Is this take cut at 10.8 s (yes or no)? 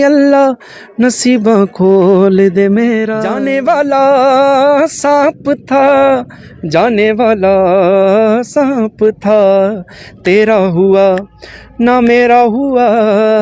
no